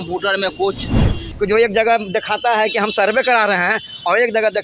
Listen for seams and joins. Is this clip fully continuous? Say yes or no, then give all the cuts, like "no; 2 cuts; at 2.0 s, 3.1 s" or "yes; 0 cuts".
no; 1 cut; at 1.2 s